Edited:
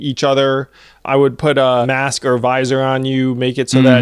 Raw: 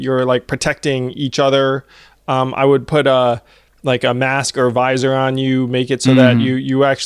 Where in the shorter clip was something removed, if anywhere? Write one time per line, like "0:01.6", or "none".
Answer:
0:01.0
0:01.9